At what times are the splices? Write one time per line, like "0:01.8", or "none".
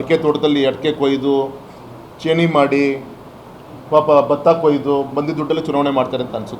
none